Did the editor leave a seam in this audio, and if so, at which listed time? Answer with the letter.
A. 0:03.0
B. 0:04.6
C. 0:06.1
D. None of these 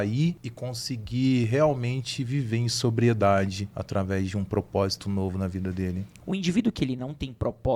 C